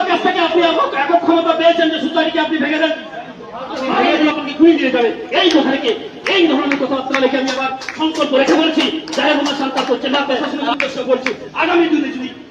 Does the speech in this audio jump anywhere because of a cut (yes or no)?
yes